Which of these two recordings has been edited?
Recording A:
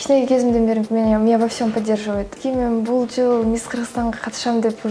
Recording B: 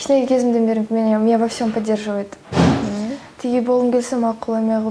A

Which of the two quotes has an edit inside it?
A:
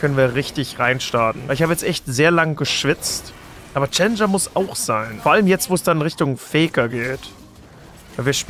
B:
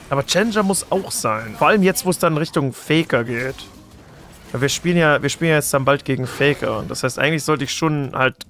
A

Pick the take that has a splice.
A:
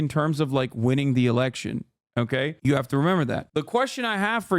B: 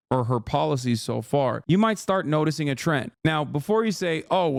A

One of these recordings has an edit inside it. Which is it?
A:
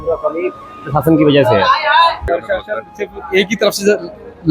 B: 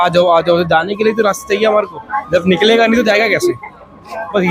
A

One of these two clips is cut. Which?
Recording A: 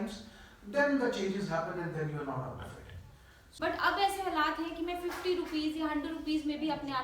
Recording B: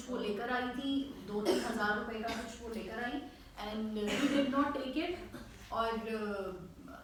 A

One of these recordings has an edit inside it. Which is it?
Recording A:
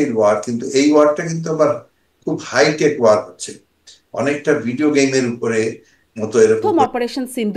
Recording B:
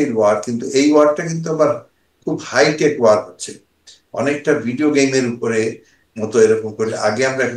A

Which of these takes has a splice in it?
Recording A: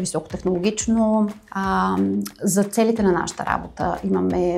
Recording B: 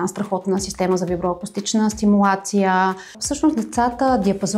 B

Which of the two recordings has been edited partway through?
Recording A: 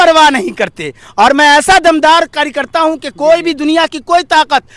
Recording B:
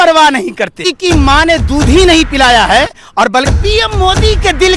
B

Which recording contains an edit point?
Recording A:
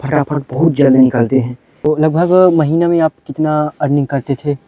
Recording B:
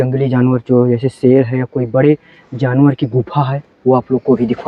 A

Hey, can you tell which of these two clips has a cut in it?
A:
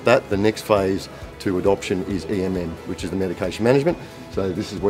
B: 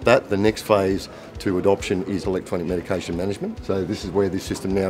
B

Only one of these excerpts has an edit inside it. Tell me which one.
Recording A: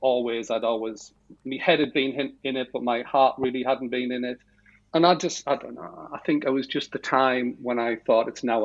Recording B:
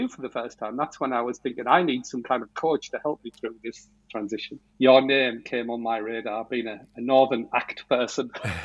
B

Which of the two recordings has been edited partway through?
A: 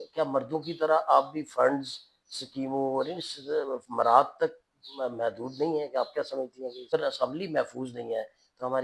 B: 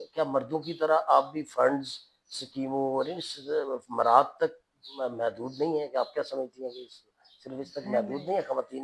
A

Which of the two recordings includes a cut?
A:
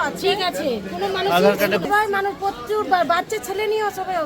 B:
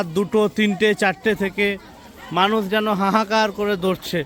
A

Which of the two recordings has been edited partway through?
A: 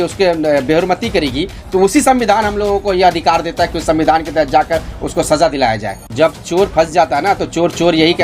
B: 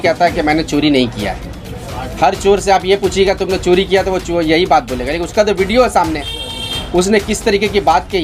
A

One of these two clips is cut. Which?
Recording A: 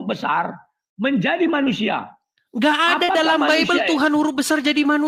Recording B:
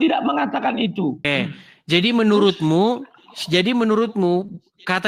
B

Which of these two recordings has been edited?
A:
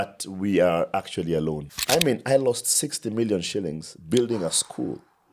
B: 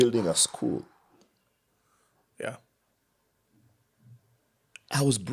A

